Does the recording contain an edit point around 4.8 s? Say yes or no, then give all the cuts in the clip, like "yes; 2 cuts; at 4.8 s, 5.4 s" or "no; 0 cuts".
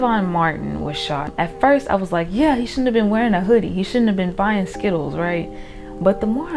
no; 1 cut; at 1.3 s